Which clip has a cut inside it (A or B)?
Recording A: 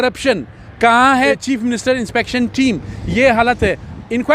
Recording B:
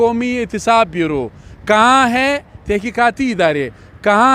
A